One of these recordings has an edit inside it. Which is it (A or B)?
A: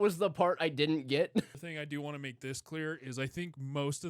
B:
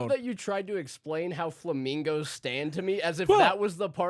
A